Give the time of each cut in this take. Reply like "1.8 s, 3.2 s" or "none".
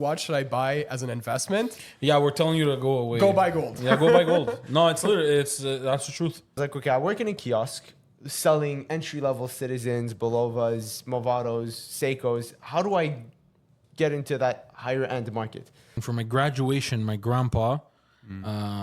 6.6 s, 16.0 s